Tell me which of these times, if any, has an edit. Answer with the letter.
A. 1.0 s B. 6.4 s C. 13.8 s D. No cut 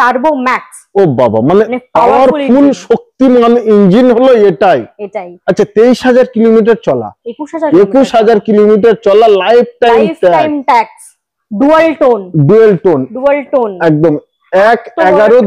D